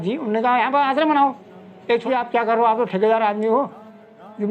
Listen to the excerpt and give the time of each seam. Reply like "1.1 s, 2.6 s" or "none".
2.0 s